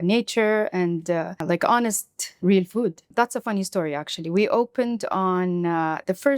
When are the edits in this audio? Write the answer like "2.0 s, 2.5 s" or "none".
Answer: 1.4 s, 3.1 s